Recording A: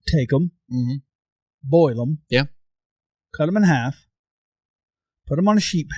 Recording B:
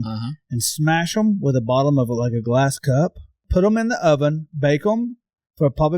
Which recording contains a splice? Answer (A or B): B